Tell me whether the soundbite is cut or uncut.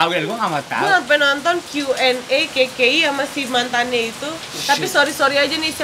uncut